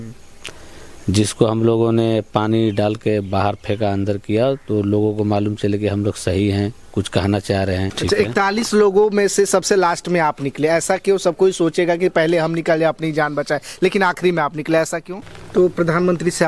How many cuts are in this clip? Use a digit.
2